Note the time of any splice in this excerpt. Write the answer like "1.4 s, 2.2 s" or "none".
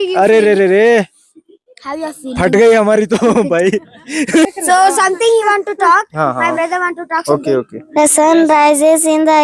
4.5 s